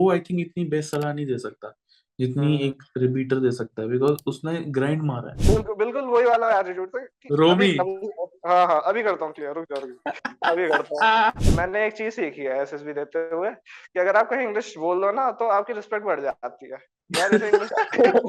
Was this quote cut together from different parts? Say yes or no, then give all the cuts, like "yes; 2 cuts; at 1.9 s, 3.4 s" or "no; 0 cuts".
yes; 2 cuts; at 5.4 s, 11.4 s